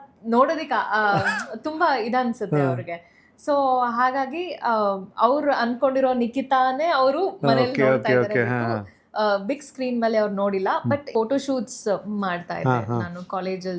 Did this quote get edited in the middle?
yes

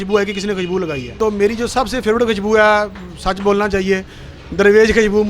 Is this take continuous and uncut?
no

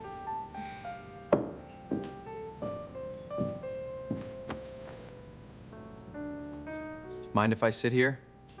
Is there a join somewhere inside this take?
no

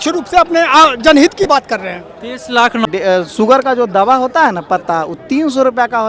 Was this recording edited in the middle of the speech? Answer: yes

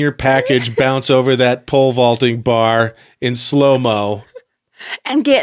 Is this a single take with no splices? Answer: yes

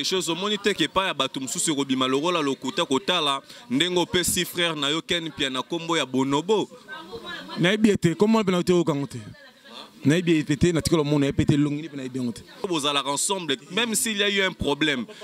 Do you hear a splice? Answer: yes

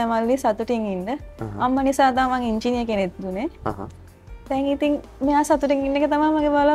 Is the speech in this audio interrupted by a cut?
no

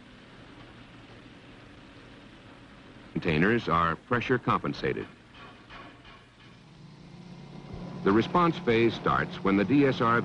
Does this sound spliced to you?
no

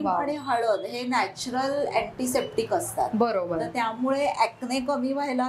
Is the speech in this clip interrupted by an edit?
no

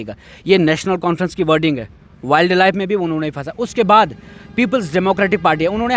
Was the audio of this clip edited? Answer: no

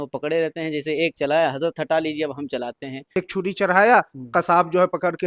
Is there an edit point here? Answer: yes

